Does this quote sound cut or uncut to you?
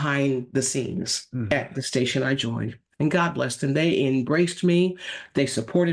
uncut